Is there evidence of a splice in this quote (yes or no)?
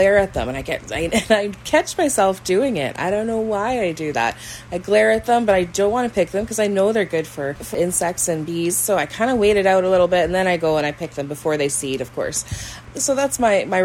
yes